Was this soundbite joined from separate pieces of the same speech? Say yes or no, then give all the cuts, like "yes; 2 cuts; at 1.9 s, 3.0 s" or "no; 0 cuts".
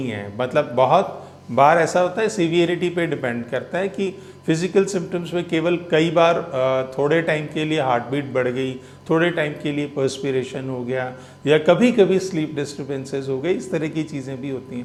no; 0 cuts